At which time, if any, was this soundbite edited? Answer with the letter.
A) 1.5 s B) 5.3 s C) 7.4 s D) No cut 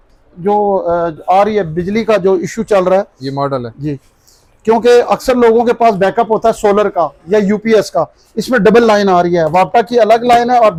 D